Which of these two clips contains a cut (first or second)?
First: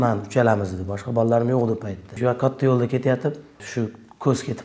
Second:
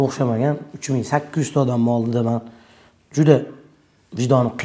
first